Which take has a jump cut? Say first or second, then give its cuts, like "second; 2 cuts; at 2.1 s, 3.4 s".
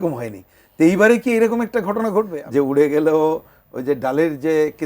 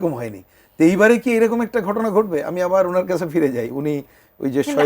first; 1 cut; at 2.4 s